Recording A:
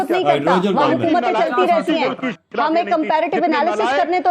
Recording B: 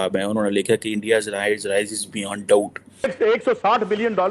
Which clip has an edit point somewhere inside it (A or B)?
B